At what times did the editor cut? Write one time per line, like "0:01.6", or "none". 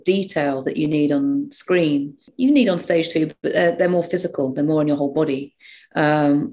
0:02.2